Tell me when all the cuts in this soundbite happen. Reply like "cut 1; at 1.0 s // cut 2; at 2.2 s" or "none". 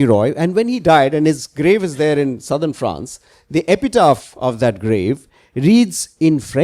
none